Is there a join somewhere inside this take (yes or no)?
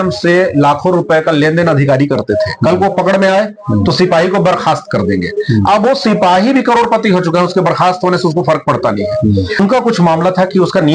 yes